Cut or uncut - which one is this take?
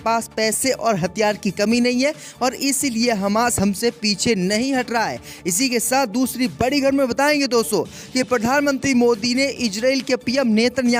uncut